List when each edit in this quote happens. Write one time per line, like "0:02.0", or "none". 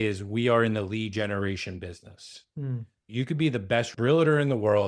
0:02.9
0:03.9